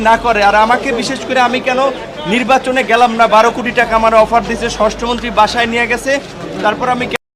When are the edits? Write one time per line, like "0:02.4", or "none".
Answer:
none